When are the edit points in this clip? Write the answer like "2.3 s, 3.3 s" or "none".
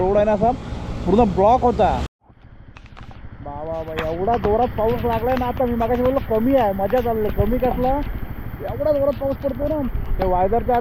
2.2 s